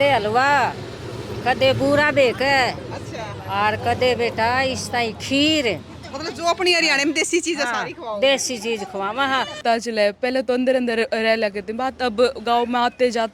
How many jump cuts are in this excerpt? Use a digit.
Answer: 1